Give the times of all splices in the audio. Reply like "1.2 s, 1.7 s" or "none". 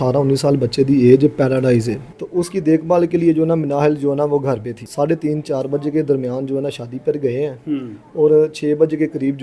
2.1 s, 4.8 s